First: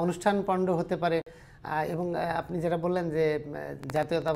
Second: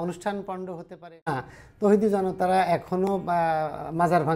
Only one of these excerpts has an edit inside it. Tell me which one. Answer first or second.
second